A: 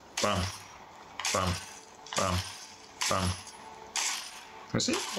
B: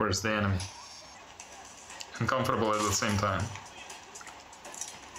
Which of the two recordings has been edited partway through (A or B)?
B